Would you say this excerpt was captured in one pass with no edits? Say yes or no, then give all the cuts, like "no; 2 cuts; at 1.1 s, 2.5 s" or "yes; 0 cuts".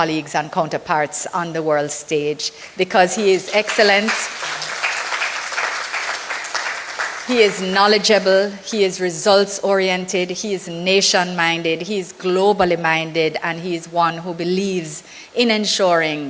yes; 0 cuts